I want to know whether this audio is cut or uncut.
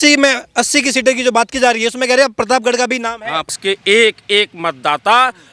cut